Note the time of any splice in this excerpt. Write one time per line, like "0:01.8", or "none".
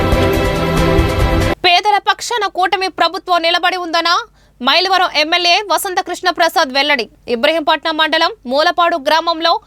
0:01.5